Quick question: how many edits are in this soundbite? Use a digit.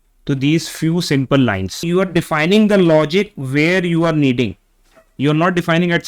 1